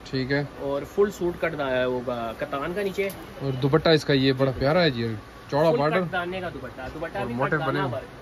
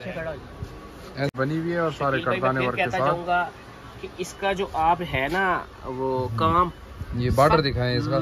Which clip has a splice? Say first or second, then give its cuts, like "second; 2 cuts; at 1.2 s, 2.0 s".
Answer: second; 1 cut; at 1.3 s